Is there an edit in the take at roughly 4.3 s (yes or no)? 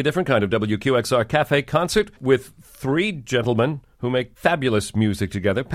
yes